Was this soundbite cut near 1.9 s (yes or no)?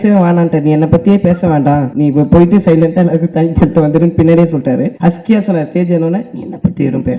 yes